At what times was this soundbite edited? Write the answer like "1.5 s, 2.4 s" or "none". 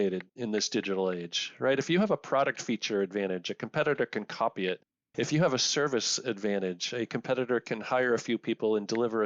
none